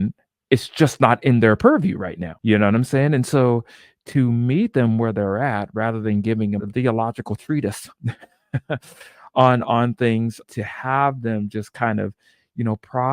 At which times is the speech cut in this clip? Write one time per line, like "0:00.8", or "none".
0:06.6
0:10.4